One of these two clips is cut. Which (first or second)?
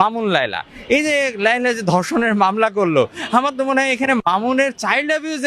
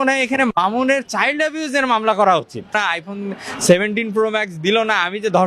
second